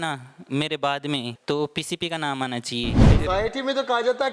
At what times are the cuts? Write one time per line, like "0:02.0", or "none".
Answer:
0:01.3
0:03.0

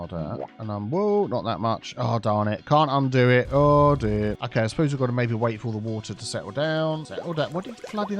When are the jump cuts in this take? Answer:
0:04.4
0:07.1

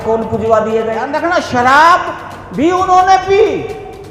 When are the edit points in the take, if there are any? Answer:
0:01.1

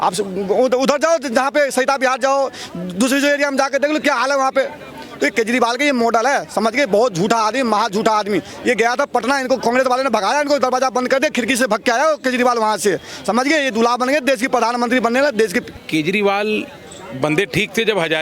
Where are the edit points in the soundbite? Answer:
0:15.7

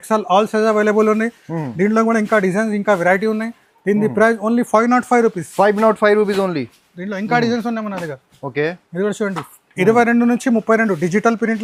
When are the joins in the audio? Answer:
none

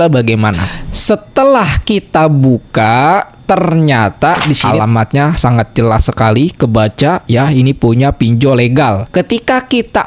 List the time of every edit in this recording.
0:04.7
0:09.0

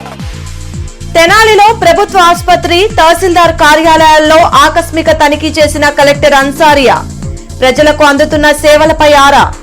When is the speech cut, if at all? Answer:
none

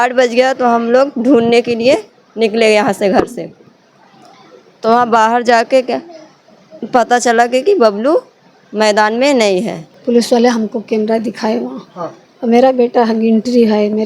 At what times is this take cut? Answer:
0:09.9

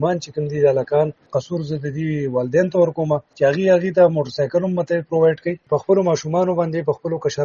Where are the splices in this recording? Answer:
0:01.3
0:03.3
0:05.6

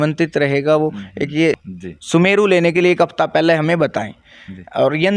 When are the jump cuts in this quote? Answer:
0:01.6

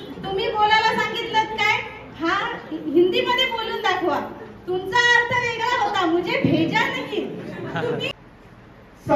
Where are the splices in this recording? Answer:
0:08.1

